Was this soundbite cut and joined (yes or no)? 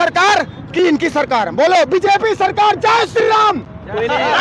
no